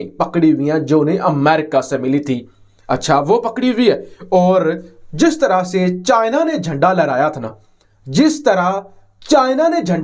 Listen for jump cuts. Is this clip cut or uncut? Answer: uncut